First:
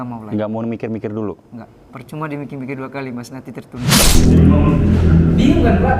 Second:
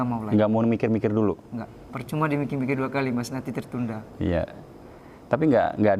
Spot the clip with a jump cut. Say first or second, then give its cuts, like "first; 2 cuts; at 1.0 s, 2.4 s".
first; 1 cut; at 4.0 s